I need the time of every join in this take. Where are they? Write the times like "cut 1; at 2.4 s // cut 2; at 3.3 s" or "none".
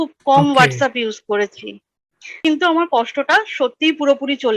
cut 1; at 2.4 s